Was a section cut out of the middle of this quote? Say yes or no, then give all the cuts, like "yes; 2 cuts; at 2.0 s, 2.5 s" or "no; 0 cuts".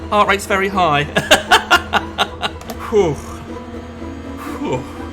yes; 1 cut; at 2.7 s